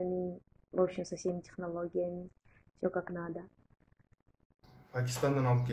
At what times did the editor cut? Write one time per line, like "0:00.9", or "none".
0:04.6

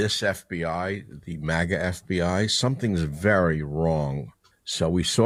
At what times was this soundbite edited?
none

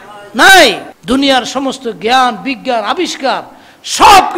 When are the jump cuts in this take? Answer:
0:00.9

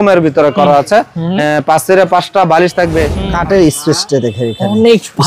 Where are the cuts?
0:03.2

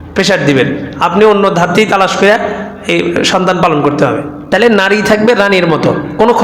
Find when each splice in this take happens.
0:04.3

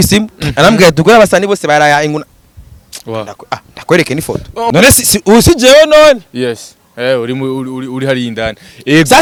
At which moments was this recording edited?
none

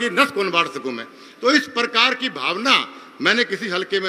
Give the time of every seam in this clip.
none

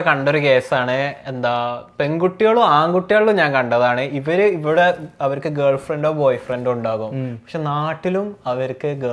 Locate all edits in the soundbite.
none

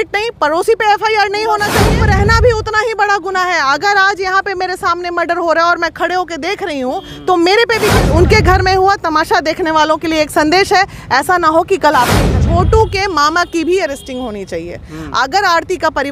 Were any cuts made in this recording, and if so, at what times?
0:01.9
0:08.0
0:12.3

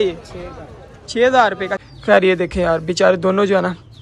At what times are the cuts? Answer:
0:01.7

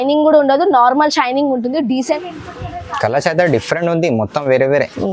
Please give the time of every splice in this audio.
0:02.0

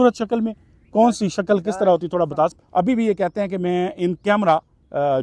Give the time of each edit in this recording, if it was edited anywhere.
0:02.5

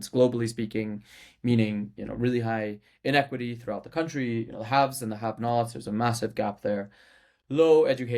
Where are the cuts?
none

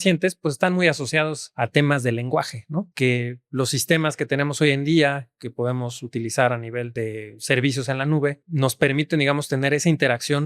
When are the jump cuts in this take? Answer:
0:01.4
0:02.9
0:06.9
0:08.4

